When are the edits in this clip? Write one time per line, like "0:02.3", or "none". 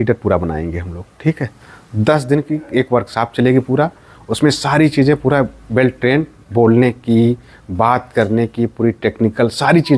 none